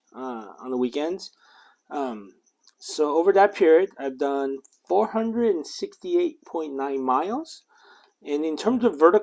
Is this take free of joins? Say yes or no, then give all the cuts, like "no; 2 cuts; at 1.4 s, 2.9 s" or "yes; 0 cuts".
yes; 0 cuts